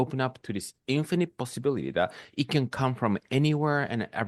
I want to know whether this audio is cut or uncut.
uncut